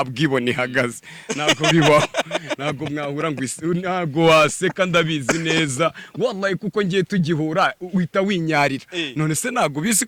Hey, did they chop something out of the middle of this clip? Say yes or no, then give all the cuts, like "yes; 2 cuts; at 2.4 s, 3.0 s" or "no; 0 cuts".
no; 0 cuts